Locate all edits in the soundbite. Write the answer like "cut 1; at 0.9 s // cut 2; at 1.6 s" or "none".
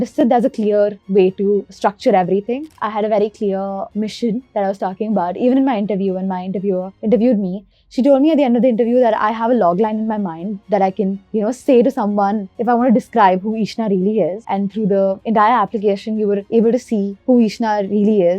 cut 1; at 2.7 s // cut 2; at 7.7 s // cut 3; at 14.4 s

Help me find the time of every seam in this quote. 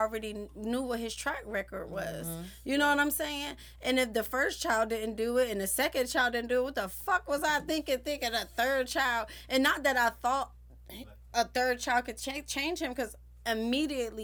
none

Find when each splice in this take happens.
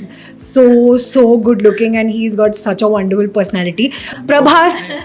cut 1; at 4.1 s

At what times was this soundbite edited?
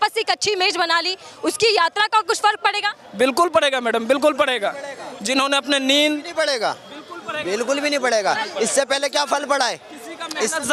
none

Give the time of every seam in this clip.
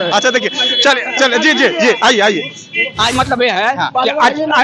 cut 1; at 3.1 s

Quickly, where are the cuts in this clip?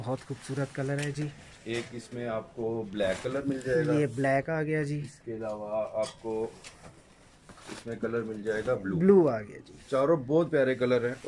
none

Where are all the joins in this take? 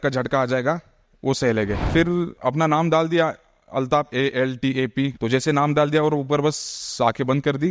cut 1; at 2.2 s // cut 2; at 5.1 s

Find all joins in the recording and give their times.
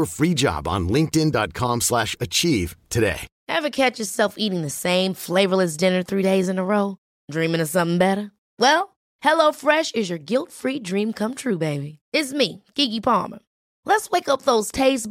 cut 1; at 3.3 s

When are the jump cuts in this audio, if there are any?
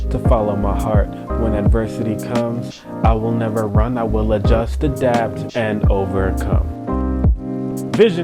none

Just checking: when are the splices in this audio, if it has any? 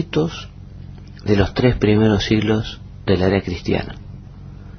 none

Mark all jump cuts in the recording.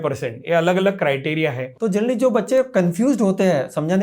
cut 1; at 1.7 s

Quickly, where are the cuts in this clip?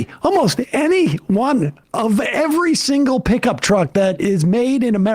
cut 1; at 1.8 s

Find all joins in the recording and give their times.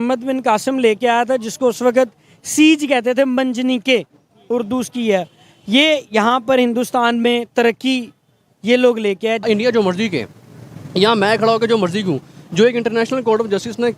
cut 1; at 9.5 s

